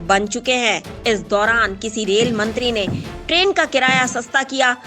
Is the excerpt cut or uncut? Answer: uncut